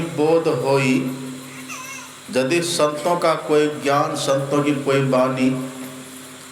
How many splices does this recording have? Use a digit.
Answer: 0